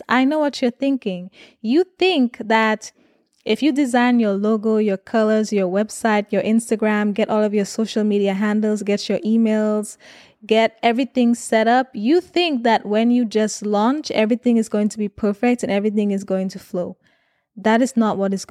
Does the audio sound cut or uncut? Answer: uncut